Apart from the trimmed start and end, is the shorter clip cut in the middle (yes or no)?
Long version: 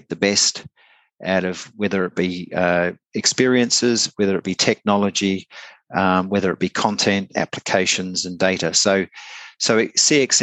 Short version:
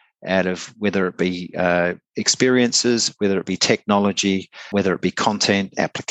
yes